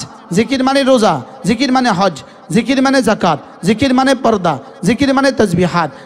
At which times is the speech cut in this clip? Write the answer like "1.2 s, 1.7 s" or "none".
none

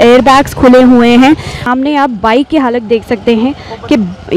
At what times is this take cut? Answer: 1.6 s

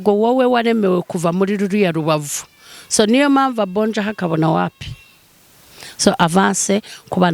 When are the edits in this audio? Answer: none

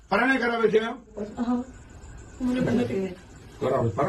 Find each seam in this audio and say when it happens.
1.3 s

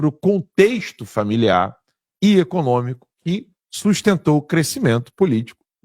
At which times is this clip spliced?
none

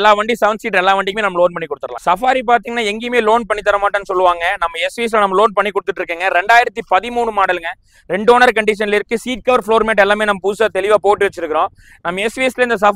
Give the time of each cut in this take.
none

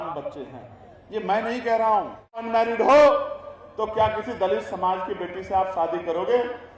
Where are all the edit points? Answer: 2.4 s

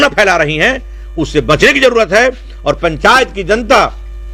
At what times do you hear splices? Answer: none

